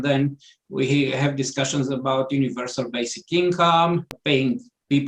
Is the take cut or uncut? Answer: cut